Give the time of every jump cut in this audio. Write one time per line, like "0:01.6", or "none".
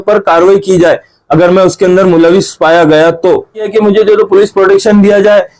0:03.7